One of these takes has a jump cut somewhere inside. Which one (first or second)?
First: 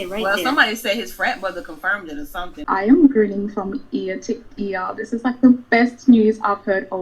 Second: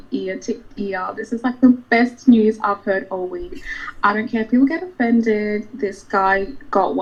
first